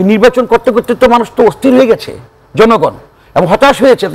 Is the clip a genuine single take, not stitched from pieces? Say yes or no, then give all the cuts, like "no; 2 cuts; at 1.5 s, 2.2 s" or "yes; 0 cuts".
yes; 0 cuts